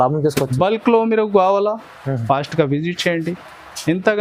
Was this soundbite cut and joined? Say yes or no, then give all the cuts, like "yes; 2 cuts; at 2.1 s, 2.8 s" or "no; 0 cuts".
no; 0 cuts